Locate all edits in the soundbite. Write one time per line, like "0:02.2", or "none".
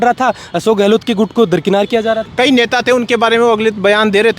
0:02.2